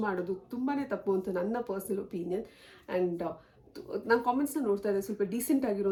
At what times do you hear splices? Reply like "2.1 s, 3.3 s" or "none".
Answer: none